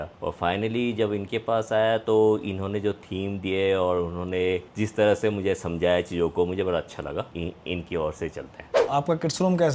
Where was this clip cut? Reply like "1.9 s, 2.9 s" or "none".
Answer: 7.3 s, 8.7 s